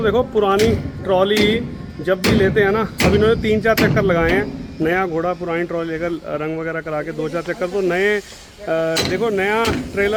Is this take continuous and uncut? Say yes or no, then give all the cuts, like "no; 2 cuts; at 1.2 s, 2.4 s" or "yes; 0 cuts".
yes; 0 cuts